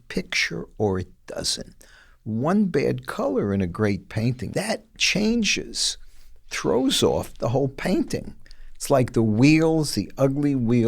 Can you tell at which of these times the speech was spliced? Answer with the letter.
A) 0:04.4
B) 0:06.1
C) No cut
A